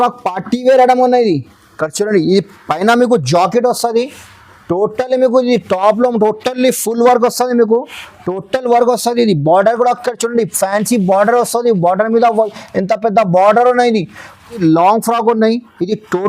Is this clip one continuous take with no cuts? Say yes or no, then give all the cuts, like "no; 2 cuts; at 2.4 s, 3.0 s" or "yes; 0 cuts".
no; 1 cut; at 14.6 s